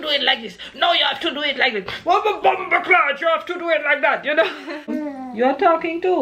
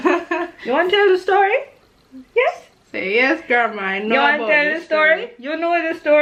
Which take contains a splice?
first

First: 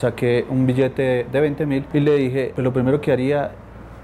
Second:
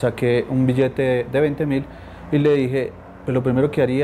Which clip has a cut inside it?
first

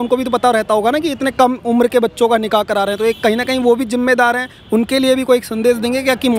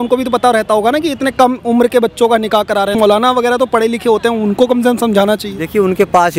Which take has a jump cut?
second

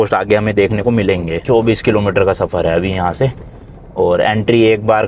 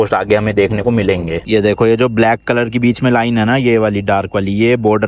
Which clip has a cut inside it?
second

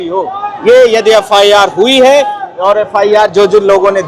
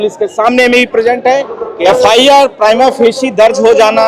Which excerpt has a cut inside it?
second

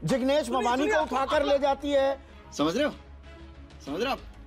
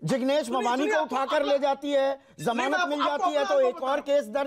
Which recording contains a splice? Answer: second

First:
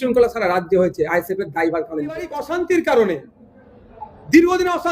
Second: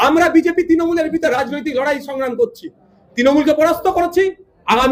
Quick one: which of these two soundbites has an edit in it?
first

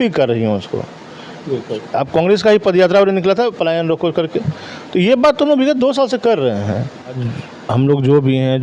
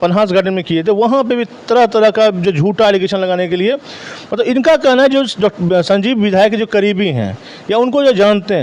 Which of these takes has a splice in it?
first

